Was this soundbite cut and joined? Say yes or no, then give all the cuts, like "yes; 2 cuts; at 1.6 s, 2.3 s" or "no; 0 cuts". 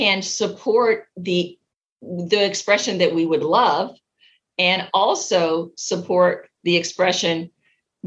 no; 0 cuts